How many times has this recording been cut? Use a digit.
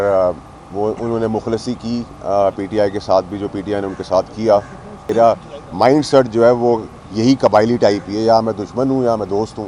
1